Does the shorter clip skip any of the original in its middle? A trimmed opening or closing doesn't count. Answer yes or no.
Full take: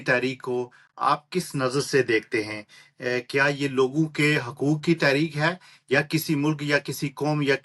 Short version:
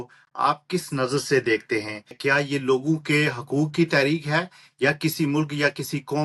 yes